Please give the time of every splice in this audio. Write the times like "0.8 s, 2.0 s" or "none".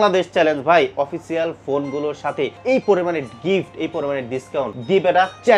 2.6 s, 4.8 s